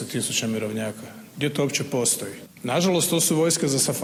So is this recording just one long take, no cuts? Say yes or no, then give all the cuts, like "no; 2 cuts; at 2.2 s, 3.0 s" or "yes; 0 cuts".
yes; 0 cuts